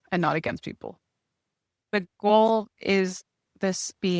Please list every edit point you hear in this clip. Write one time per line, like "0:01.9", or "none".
0:01.8

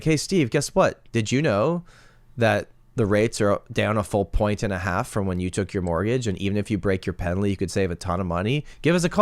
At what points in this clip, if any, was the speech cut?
none

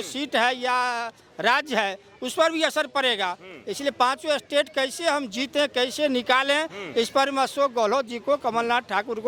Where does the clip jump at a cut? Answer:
none

